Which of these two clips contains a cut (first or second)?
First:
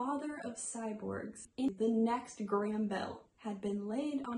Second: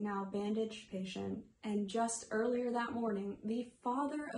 first